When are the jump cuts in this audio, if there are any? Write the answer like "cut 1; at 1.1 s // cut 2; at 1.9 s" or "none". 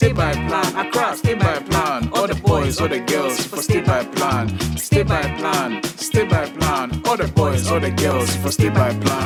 none